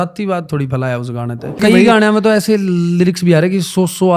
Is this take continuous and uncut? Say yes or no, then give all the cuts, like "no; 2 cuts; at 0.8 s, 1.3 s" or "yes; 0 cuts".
no; 1 cut; at 1.6 s